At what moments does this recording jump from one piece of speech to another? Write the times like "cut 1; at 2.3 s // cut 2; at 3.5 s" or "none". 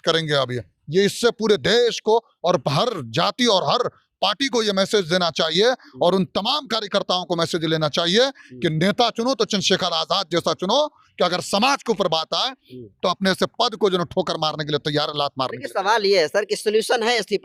none